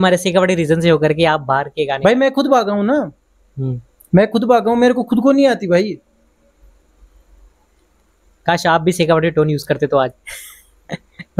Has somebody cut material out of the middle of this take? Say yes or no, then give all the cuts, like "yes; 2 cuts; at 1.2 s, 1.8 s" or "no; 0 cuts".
no; 0 cuts